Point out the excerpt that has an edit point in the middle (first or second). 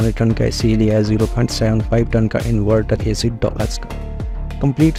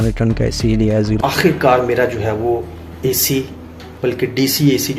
second